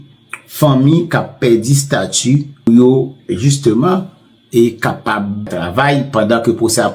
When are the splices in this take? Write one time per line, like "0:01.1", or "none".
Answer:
0:02.7
0:05.5

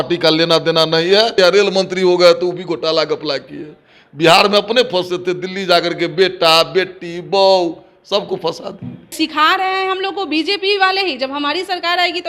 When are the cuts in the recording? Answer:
0:01.3
0:09.1

